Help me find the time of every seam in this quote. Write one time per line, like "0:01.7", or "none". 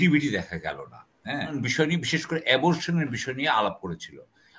0:01.6